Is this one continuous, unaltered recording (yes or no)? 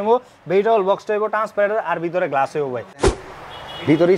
no